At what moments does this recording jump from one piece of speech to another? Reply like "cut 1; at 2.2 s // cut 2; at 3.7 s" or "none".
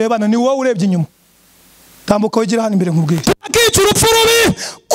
cut 1; at 3.2 s